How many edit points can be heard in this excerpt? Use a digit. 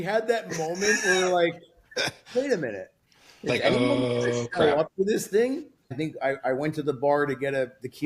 1